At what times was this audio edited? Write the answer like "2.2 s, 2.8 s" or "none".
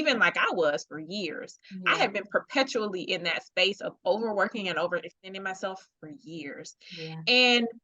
none